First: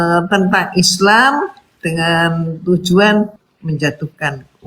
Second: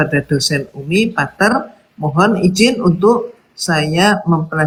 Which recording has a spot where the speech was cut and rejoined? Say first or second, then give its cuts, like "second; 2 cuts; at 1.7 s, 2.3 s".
first; 1 cut; at 3.5 s